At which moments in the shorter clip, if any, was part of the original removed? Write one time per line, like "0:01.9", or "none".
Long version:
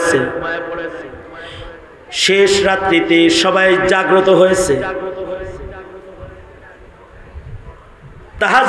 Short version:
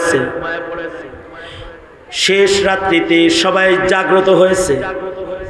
none